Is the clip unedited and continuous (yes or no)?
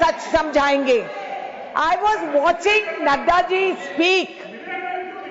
yes